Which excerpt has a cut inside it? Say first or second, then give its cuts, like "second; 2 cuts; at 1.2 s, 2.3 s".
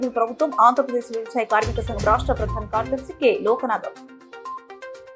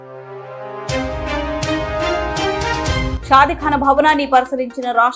second; 1 cut; at 3.1 s